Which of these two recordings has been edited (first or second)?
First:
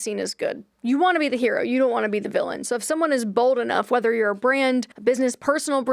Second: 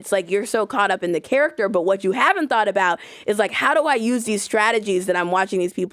first